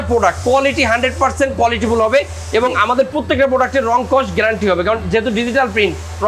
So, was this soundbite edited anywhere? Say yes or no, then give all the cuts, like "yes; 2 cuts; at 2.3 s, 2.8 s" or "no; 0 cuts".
no; 0 cuts